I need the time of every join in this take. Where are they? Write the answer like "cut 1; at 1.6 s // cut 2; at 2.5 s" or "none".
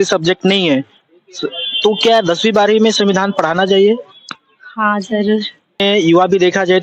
cut 1; at 5.8 s